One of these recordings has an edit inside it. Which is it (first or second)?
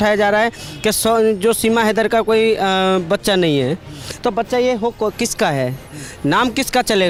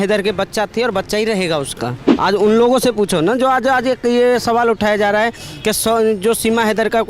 second